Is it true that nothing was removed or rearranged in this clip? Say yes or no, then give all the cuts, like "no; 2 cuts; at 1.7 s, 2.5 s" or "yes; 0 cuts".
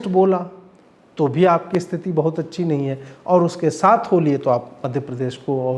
yes; 0 cuts